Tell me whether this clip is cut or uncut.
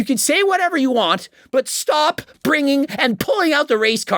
uncut